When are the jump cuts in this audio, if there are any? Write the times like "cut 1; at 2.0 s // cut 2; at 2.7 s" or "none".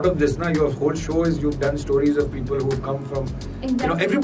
none